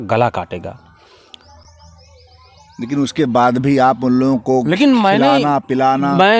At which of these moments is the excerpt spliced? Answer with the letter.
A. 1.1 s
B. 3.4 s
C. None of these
C